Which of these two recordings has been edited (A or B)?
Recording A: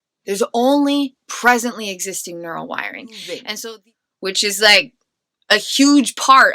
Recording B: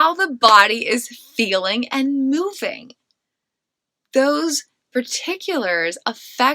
A